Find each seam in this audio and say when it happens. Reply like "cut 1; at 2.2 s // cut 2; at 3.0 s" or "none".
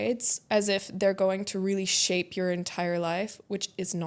none

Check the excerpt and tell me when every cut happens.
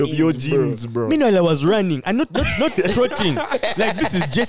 none

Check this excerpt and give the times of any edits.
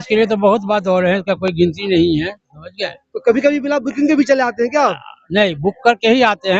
none

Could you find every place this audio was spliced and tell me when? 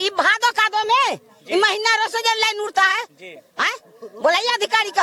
none

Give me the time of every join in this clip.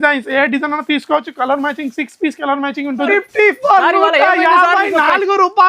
cut 1; at 3.1 s

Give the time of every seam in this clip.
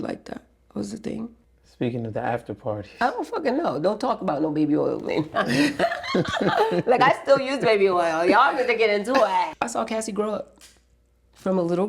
cut 1; at 1.5 s // cut 2; at 9.5 s

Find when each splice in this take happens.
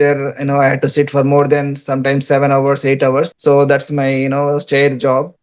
none

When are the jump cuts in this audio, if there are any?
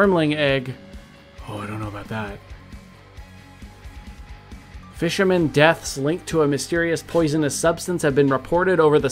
none

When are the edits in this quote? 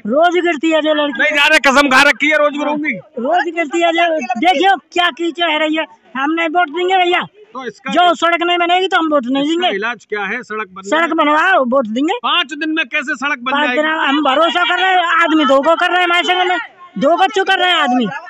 none

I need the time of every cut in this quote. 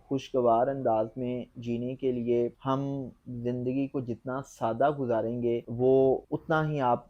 cut 1; at 2.6 s // cut 2; at 5.7 s // cut 3; at 6.2 s

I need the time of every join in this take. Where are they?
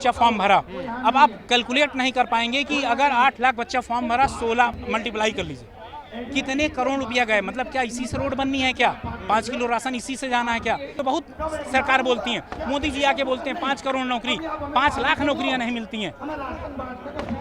cut 1; at 4.8 s // cut 2; at 10.9 s

